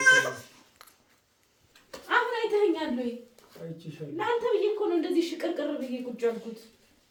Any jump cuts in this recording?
no; 0 cuts

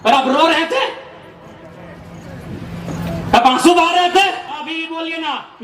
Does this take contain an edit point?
yes; 1 cut; at 4.6 s

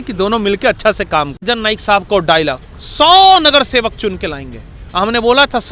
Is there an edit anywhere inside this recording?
yes; 1 cut; at 1.5 s

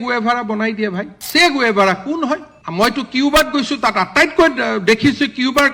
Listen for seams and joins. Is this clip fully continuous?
no; 2 cuts; at 1.2 s, 2.6 s

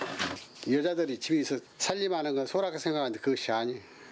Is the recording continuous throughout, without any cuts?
no; 1 cut; at 1.7 s

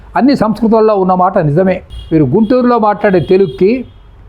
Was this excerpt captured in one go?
no; 1 cut; at 1.9 s

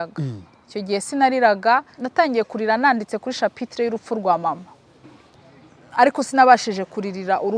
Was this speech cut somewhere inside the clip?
yes; 2 cuts; at 2.0 s, 5.3 s

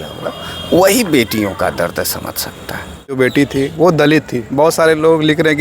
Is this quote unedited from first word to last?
no; 1 cut; at 3.2 s

